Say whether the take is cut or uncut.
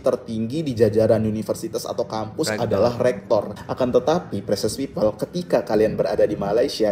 cut